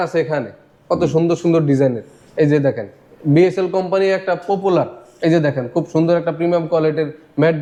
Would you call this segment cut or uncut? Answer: uncut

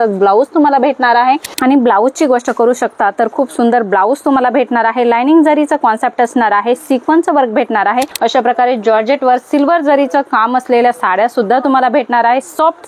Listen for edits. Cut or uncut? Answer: cut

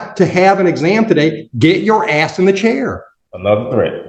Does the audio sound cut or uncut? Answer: cut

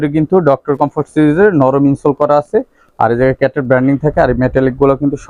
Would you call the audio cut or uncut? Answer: uncut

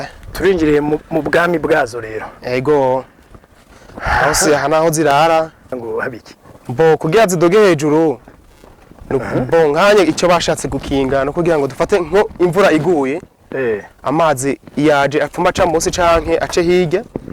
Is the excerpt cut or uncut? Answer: cut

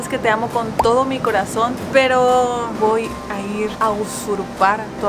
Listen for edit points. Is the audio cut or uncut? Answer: cut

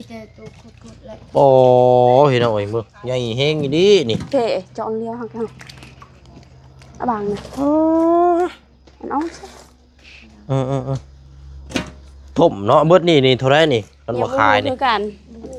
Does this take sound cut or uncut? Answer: uncut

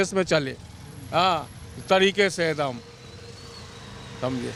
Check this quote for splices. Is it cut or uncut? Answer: uncut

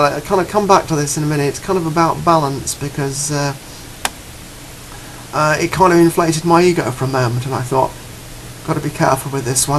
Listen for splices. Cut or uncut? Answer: cut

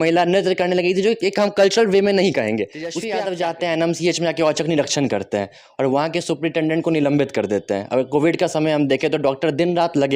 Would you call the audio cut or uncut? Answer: cut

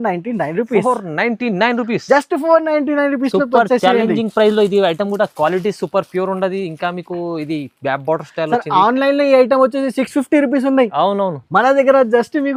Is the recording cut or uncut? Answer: uncut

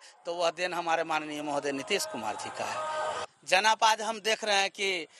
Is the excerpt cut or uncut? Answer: cut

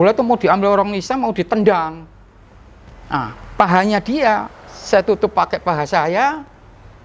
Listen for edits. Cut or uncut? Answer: uncut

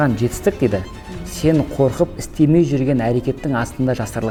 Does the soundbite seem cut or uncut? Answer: uncut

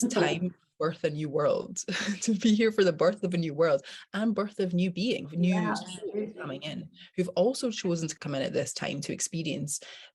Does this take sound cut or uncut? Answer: cut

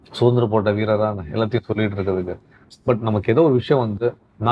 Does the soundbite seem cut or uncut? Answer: uncut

